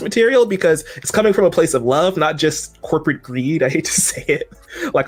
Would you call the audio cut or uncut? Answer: uncut